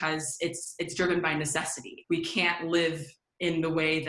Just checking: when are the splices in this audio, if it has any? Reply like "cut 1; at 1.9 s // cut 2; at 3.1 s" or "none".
cut 1; at 2.0 s